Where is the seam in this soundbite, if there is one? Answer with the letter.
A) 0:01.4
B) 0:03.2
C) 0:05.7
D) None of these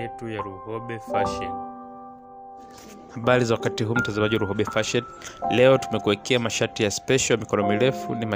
B